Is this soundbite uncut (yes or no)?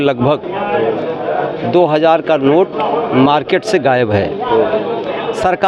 yes